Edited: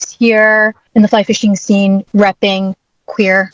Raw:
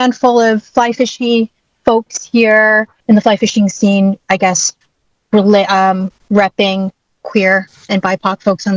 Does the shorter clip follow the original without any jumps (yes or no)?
no